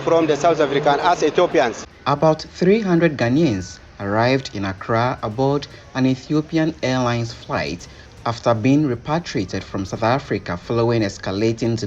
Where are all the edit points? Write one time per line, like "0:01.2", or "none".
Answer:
0:01.9